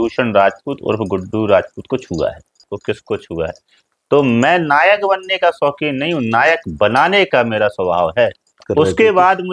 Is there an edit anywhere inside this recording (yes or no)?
yes